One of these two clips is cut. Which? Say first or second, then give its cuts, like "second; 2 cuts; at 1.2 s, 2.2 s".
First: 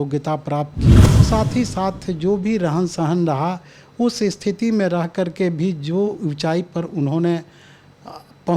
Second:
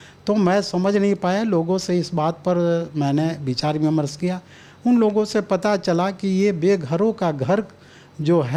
first; 1 cut; at 1.1 s